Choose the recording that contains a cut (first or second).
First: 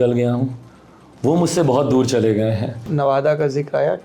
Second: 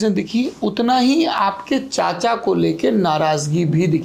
first